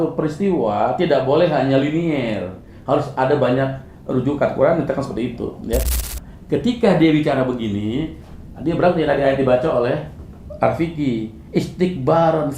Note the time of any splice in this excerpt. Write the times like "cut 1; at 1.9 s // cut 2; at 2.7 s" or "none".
cut 1; at 5.9 s